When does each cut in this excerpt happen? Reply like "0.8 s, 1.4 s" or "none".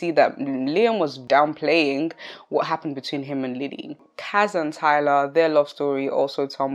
1.2 s, 4.0 s